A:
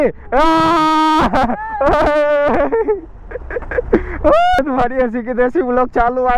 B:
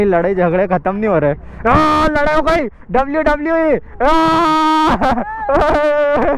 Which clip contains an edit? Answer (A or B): A